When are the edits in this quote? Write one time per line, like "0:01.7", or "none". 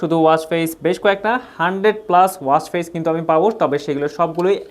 none